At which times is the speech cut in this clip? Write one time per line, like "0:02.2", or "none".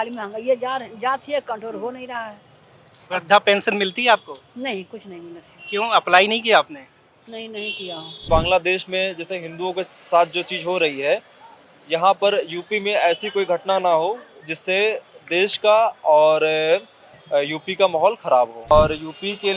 0:08.2
0:18.7